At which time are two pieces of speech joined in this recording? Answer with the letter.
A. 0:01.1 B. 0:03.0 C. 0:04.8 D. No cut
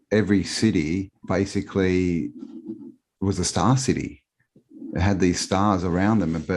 A